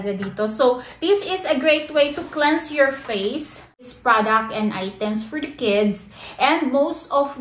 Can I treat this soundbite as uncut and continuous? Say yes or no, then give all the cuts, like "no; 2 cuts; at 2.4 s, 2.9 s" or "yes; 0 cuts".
no; 1 cut; at 3.8 s